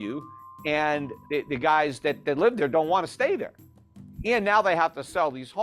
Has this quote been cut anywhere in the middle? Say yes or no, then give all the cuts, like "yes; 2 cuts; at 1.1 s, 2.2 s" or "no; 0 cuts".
yes; 1 cut; at 1.1 s